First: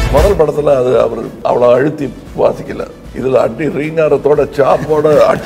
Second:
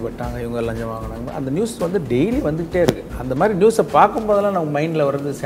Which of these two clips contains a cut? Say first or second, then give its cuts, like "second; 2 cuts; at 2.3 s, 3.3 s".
first; 3 cuts; at 1.3 s, 2.2 s, 3.0 s